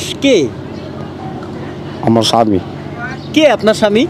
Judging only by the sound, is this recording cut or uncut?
cut